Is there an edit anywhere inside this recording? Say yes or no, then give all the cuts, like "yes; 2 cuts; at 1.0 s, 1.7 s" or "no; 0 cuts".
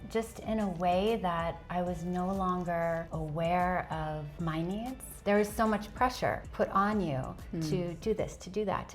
yes; 4 cuts; at 3.1 s, 4.3 s, 5.1 s, 6.4 s